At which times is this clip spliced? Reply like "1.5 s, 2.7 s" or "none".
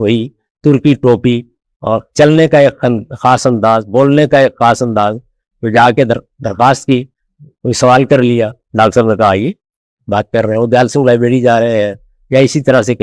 none